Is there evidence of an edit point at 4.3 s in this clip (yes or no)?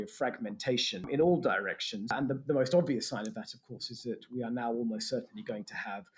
no